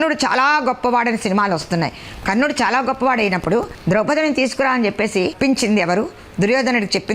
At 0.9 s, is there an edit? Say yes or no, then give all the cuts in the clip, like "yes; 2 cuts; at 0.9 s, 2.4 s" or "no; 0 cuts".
no; 2 cuts; at 3.7 s, 5.3 s